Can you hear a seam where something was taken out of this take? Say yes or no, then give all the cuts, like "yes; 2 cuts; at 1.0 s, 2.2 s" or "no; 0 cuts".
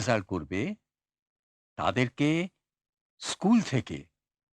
no; 0 cuts